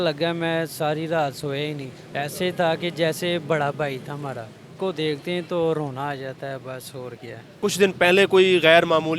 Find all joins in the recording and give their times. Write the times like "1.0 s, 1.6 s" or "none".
2.0 s, 4.7 s, 7.4 s